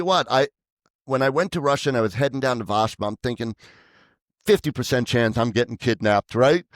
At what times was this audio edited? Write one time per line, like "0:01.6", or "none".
none